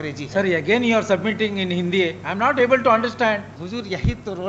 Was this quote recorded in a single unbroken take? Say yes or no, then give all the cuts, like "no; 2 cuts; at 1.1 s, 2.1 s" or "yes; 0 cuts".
no; 1 cut; at 3.6 s